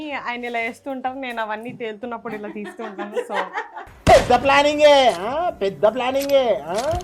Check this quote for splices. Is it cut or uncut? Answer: uncut